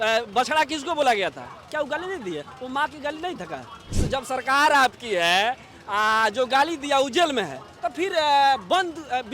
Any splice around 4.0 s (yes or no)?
yes